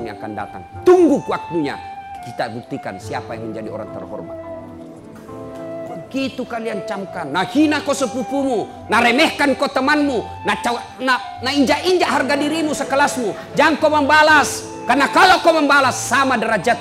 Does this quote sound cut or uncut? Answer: cut